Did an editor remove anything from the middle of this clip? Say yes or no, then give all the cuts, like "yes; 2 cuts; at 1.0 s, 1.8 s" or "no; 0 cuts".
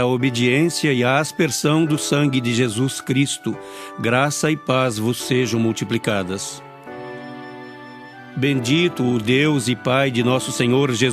yes; 1 cut; at 8.4 s